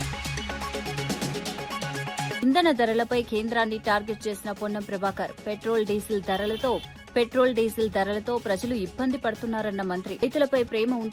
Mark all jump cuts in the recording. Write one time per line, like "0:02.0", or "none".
0:00.8
0:02.4